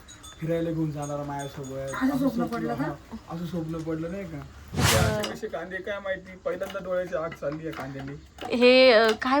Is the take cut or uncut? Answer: cut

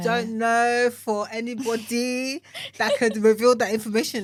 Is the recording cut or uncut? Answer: uncut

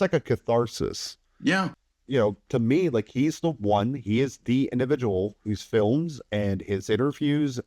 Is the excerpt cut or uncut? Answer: cut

